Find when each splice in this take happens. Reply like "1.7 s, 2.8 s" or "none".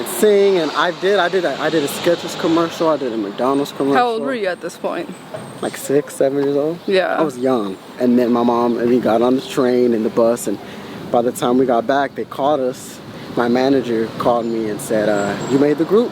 7.9 s